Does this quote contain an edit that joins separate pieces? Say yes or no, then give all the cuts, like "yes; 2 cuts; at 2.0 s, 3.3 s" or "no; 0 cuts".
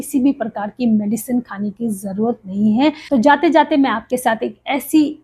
yes; 1 cut; at 3.0 s